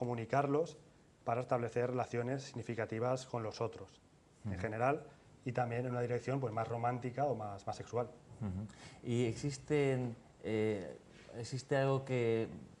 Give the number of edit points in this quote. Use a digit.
0